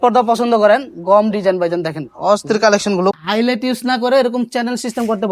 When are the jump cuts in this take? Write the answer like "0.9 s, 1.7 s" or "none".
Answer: 3.2 s